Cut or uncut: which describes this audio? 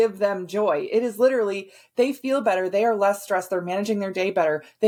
uncut